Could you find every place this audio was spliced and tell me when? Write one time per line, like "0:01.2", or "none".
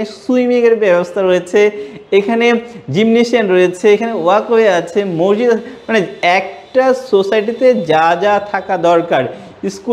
none